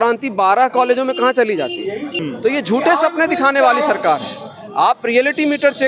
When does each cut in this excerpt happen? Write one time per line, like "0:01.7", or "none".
0:02.1